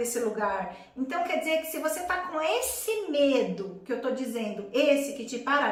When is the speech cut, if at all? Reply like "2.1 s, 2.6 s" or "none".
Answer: none